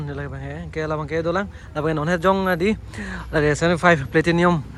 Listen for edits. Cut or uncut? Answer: uncut